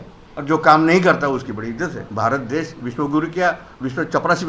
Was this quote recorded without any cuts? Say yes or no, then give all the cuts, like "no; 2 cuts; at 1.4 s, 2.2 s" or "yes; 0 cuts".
no; 1 cut; at 2.0 s